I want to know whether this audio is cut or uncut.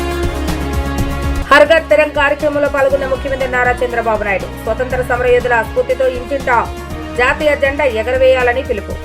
cut